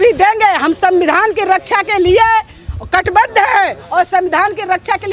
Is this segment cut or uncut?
uncut